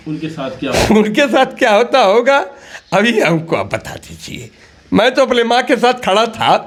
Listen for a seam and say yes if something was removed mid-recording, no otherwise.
no